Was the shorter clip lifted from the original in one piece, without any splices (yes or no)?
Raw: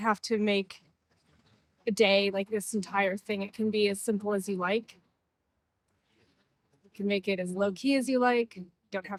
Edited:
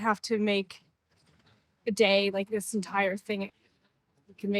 no